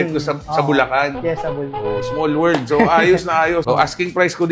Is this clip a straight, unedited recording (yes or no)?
yes